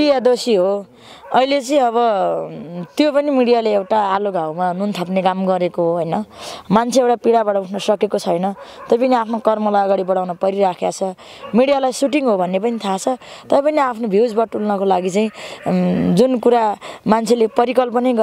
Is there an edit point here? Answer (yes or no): no